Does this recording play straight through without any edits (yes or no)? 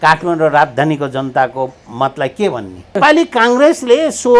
no